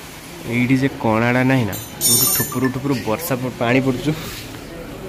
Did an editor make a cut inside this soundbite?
no; 0 cuts

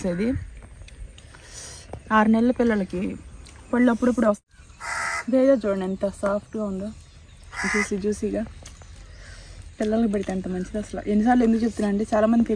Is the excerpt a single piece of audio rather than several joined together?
no; 1 cut; at 4.4 s

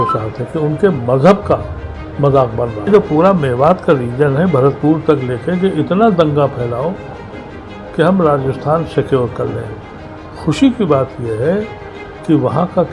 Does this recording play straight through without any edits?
no; 1 cut; at 2.9 s

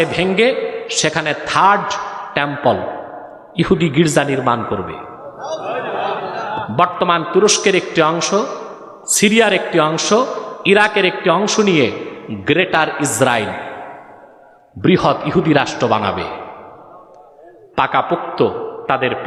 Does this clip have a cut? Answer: no; 0 cuts

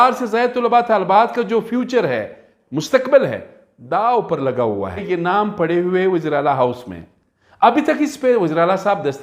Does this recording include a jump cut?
yes; 1 cut; at 5.0 s

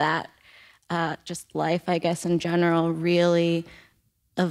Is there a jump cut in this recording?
no; 0 cuts

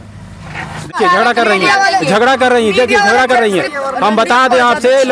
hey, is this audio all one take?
no; 1 cut; at 1.0 s

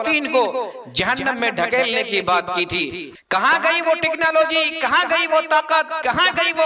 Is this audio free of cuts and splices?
no; 1 cut; at 3.1 s

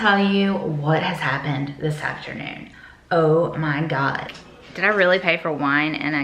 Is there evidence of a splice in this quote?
yes; 1 cut; at 4.3 s

